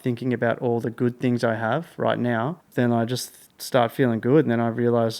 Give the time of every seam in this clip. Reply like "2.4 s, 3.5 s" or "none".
2.6 s